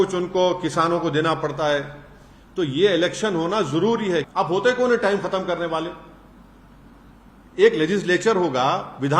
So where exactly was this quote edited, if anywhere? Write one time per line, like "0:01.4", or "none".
0:04.3